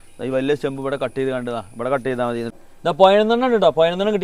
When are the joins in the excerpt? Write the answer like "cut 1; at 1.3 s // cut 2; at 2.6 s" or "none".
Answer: cut 1; at 2.5 s

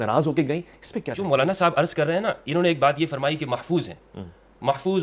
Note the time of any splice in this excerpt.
cut 1; at 1.1 s

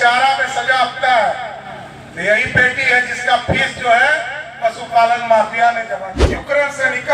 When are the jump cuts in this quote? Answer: cut 1; at 6.1 s

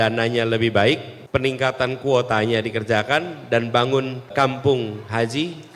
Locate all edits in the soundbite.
cut 1; at 1.1 s // cut 2; at 4.3 s

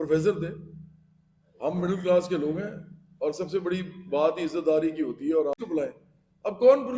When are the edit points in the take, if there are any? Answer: cut 1; at 5.5 s

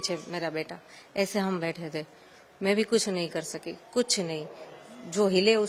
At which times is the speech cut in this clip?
none

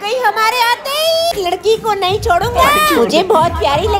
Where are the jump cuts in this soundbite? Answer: cut 1; at 1.3 s

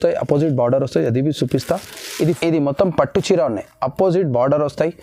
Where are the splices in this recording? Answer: cut 1; at 2.3 s

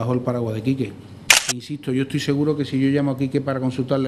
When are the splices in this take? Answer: cut 1; at 1.7 s

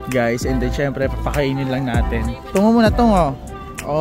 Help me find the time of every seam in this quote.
cut 1; at 2.4 s

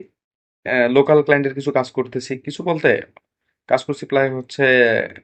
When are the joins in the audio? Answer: none

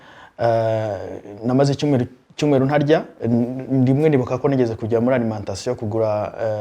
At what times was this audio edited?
cut 1; at 3.1 s

